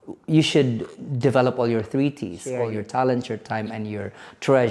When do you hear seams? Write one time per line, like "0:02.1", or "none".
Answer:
0:02.6

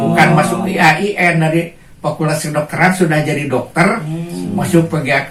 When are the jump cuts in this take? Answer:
none

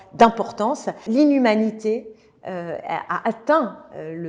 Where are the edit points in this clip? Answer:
0:01.0

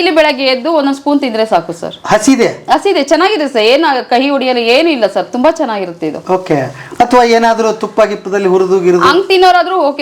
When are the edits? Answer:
none

